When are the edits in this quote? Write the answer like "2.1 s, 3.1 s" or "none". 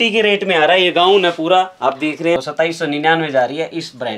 2.4 s